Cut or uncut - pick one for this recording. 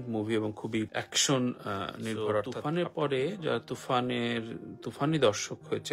cut